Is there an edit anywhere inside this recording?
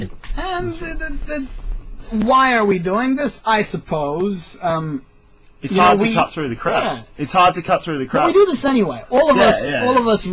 yes; 1 cut; at 8.0 s

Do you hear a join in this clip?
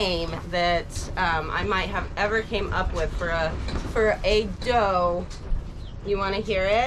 no; 0 cuts

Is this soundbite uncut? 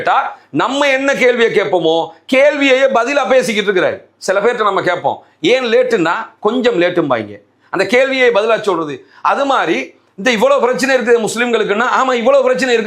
yes; 0 cuts

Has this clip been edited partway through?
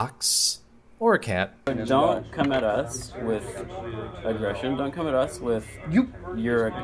yes; 1 cut; at 1.9 s

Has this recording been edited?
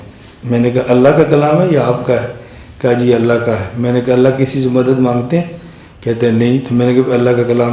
no; 0 cuts

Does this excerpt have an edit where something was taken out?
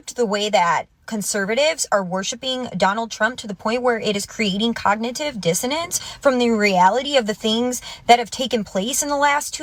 no; 0 cuts

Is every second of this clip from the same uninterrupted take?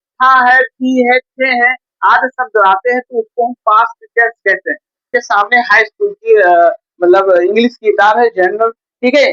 no; 1 cut; at 5.1 s

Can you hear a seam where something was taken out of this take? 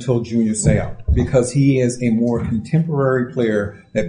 no; 0 cuts

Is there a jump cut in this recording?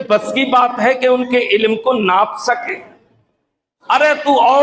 no; 0 cuts

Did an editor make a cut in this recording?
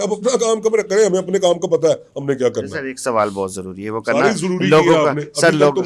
no; 0 cuts

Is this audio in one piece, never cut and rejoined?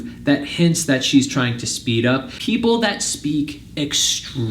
no; 1 cut; at 2.3 s

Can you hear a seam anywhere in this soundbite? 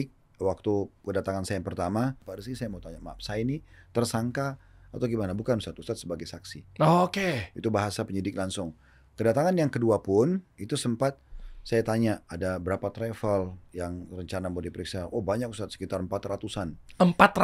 yes; 2 cuts; at 2.3 s, 10.5 s

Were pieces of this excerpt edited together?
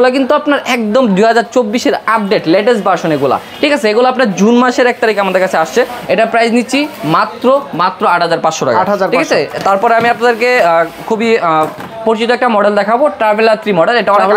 no; 0 cuts

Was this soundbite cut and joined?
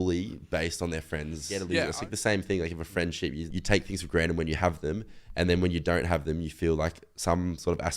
yes; 2 cuts; at 1.6 s, 3.5 s

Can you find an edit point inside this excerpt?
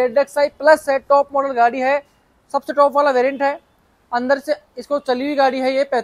no; 0 cuts

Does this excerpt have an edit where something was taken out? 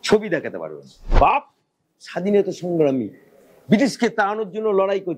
yes; 1 cut; at 1.1 s

